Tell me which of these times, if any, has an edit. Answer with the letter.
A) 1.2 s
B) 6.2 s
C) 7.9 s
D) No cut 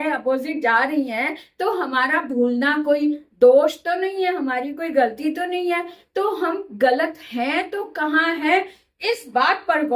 D